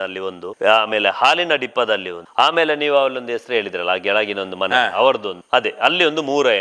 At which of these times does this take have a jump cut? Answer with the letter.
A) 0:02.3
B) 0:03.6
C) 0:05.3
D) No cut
C